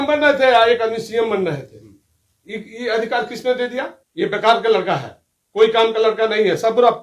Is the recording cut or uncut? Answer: cut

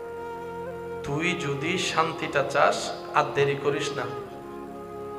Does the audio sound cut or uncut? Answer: cut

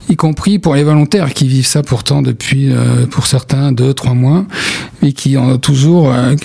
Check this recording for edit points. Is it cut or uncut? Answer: uncut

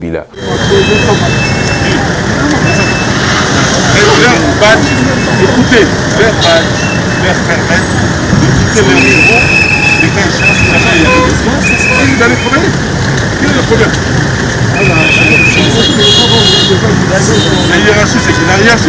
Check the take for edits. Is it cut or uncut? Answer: uncut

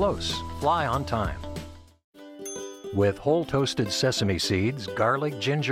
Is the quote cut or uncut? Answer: uncut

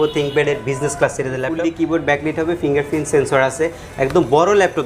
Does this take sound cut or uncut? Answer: cut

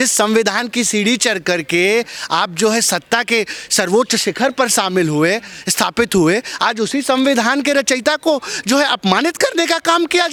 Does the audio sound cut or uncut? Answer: uncut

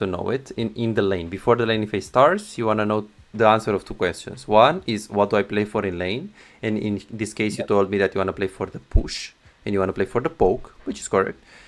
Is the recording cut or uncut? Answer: uncut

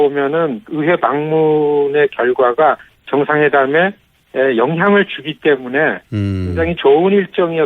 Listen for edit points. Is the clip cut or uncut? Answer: cut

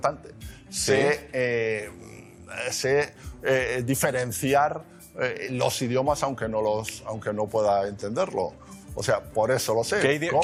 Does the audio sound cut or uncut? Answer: uncut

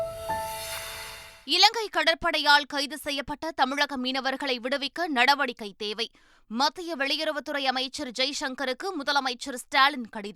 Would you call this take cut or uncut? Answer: cut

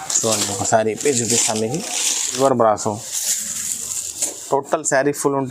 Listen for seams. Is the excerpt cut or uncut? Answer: cut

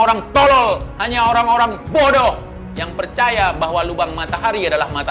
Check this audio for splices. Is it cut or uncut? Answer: uncut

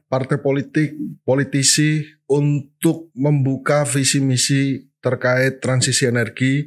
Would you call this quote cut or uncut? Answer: uncut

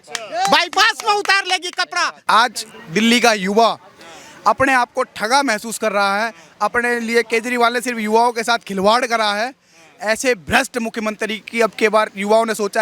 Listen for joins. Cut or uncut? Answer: cut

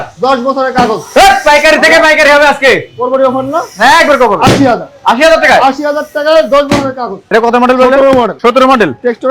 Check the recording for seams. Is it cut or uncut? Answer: cut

